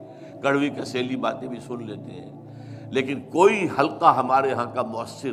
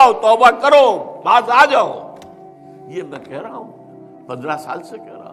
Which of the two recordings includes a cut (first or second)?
second